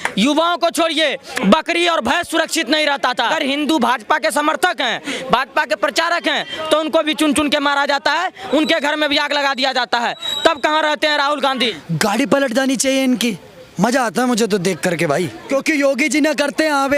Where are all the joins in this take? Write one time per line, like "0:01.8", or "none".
0:03.3
0:11.8
0:15.4